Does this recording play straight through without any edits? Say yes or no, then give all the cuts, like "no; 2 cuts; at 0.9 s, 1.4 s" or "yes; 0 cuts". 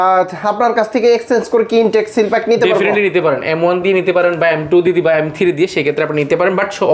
yes; 0 cuts